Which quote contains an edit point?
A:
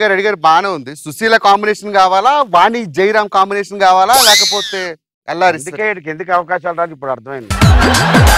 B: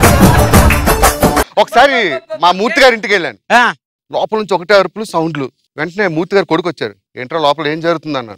B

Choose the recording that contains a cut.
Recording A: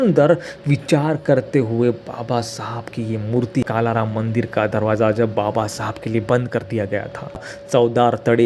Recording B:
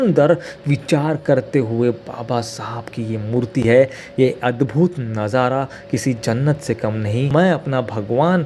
A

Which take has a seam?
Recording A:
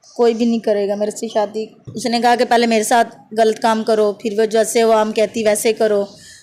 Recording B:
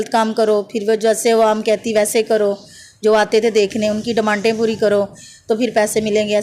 A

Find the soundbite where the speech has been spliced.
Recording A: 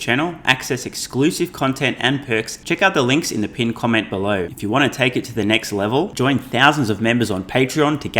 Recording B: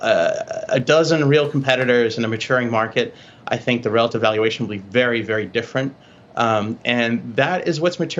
A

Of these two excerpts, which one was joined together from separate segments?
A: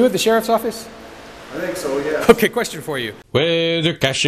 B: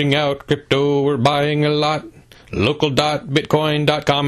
A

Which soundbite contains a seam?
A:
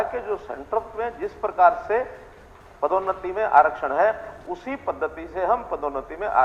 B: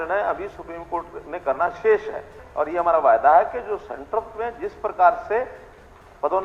B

